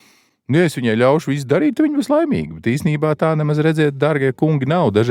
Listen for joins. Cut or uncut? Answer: uncut